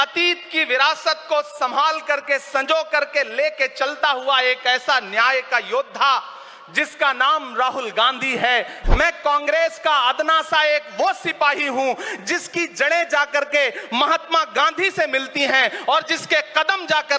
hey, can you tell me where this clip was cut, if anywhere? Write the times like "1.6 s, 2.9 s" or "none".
8.8 s